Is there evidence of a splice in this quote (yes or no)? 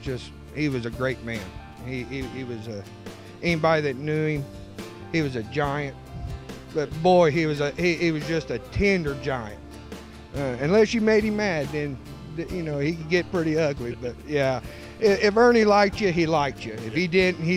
no